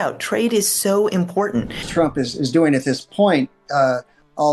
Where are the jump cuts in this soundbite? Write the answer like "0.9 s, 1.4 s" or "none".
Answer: 1.8 s